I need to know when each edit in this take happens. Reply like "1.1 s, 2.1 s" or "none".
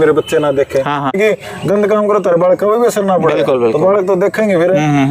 1.1 s